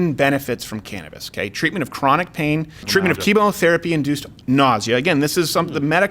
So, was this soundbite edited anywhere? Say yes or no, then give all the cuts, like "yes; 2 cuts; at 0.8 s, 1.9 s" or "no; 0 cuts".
yes; 1 cut; at 2.8 s